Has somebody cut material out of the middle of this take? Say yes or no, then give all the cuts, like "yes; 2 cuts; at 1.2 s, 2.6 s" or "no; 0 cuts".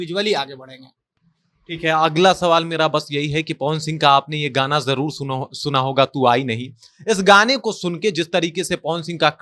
no; 0 cuts